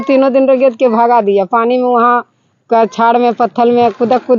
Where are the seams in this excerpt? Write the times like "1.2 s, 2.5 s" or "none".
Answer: none